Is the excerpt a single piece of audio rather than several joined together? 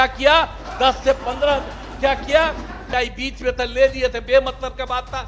no; 1 cut; at 2.8 s

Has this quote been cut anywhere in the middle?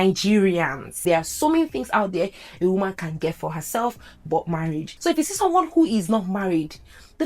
yes; 2 cuts; at 0.9 s, 4.9 s

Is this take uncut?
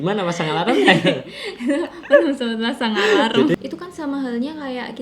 no; 1 cut; at 3.5 s

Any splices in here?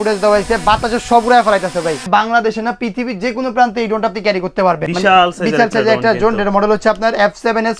yes; 2 cuts; at 2.0 s, 4.8 s

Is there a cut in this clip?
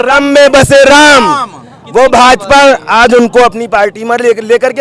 no; 0 cuts

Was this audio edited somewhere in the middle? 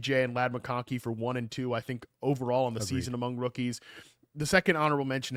no; 0 cuts

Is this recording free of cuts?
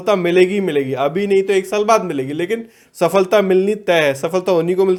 yes; 0 cuts

